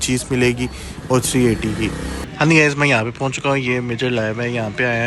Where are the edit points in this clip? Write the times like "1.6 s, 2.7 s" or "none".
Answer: 2.2 s